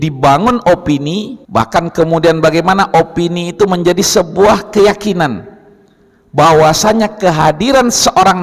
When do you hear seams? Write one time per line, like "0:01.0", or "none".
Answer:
0:01.4